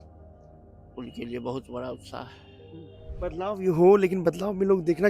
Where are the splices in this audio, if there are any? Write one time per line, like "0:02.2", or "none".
0:03.0